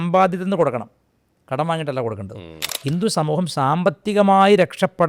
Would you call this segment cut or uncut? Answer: cut